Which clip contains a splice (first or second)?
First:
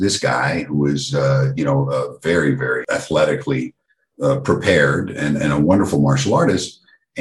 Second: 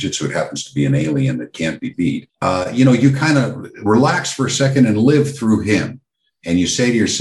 second